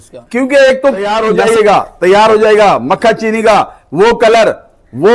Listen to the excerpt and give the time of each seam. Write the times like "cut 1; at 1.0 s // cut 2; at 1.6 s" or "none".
cut 1; at 1.0 s